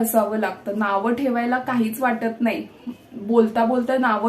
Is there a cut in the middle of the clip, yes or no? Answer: no